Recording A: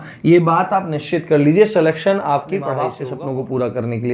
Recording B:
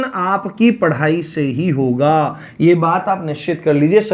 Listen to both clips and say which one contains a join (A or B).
A